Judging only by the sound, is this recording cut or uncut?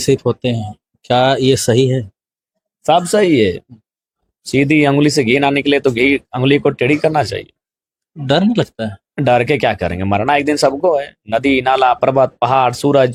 uncut